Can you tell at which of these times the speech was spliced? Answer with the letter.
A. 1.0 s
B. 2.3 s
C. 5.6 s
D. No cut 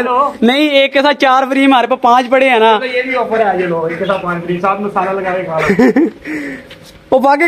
D